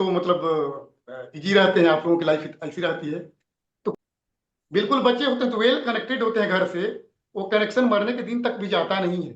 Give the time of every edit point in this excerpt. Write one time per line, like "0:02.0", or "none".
0:03.9